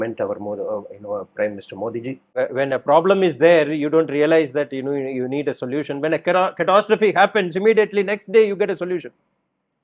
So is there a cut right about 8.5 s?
no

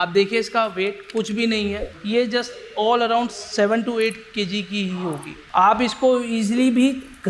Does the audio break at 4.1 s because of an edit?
no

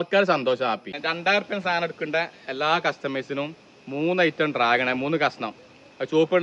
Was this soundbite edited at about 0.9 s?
yes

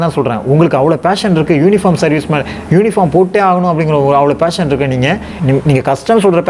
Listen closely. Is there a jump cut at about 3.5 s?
no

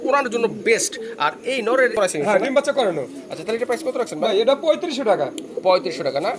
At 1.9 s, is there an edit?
yes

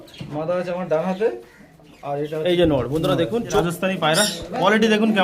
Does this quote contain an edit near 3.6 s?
yes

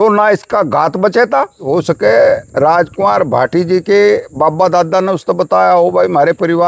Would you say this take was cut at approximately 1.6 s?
yes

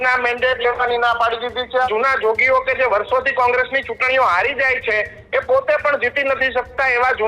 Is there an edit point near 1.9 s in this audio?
yes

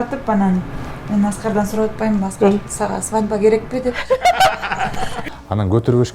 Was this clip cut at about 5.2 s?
yes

